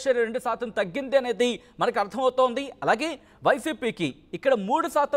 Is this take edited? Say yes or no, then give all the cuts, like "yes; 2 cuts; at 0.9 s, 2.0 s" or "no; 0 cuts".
no; 0 cuts